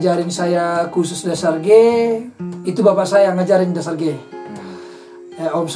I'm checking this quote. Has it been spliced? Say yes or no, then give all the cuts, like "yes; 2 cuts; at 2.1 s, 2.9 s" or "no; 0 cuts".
no; 0 cuts